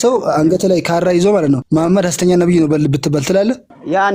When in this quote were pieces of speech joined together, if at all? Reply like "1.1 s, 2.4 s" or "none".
1.6 s